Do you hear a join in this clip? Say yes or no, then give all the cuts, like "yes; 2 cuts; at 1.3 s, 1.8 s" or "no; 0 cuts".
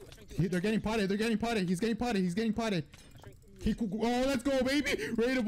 no; 0 cuts